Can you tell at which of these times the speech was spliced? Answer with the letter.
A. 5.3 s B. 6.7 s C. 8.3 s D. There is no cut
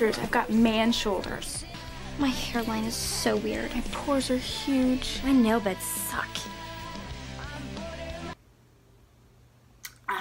C